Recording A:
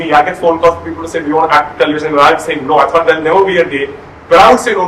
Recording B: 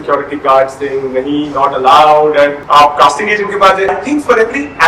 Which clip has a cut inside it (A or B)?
B